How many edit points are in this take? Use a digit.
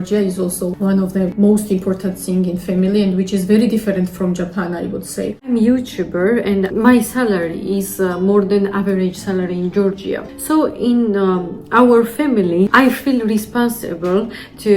1